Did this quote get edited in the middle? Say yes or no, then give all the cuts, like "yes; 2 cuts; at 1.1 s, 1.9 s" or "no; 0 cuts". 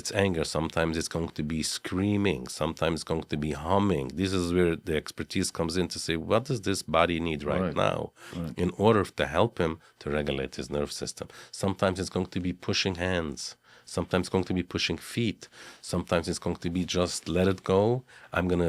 no; 0 cuts